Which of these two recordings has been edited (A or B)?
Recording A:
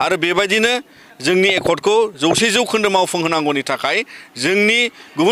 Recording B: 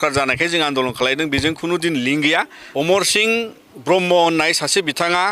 B